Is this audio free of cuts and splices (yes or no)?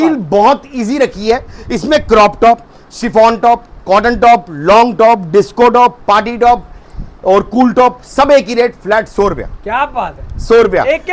yes